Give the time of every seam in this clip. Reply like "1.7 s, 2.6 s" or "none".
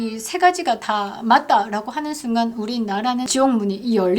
3.3 s